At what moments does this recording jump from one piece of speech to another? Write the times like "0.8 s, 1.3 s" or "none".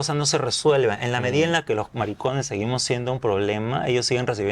none